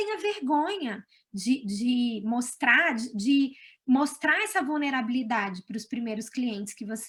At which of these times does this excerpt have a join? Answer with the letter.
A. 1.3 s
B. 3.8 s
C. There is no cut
C